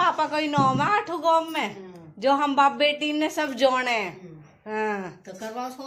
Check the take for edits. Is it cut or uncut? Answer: uncut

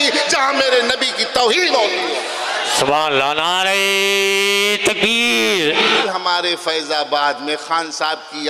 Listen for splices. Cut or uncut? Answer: cut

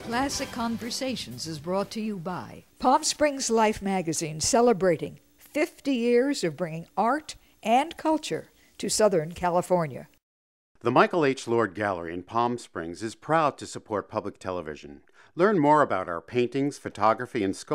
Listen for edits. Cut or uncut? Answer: uncut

